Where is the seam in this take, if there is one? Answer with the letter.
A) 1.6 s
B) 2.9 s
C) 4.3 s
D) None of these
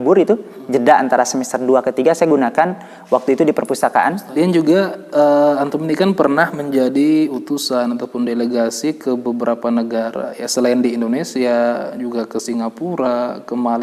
C